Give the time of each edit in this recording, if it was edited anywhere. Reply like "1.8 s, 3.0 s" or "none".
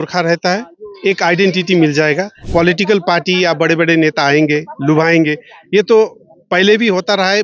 2.4 s